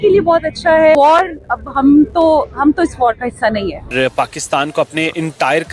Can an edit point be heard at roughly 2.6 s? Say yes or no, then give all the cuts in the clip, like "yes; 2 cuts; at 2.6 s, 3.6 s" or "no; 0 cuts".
no; 2 cuts; at 1.0 s, 3.9 s